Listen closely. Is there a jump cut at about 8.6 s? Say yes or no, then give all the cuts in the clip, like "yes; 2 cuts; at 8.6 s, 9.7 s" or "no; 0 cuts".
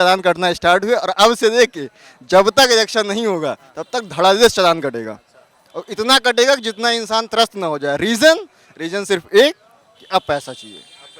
no; 0 cuts